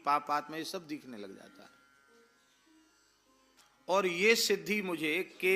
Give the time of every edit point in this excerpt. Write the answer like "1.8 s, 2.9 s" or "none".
3.6 s